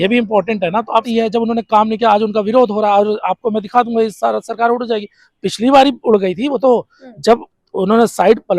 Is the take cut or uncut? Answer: cut